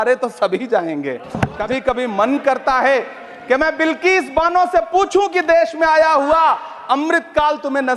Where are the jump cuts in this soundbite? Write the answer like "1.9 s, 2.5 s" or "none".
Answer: 1.6 s